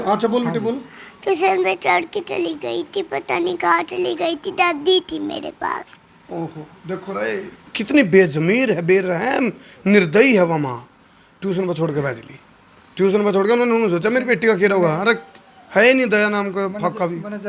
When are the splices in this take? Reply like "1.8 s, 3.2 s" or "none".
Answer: none